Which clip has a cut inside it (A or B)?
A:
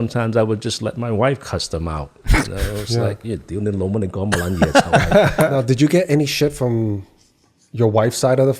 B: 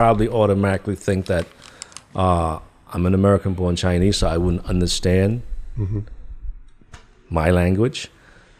A